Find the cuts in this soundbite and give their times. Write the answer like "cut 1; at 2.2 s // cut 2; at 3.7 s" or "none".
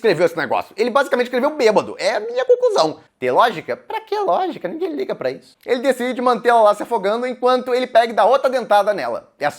cut 1; at 3.1 s // cut 2; at 5.4 s